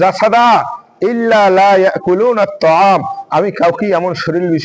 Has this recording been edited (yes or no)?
no